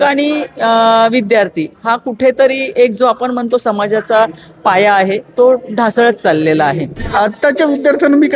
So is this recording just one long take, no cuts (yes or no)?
no